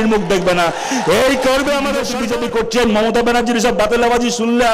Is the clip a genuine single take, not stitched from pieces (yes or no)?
no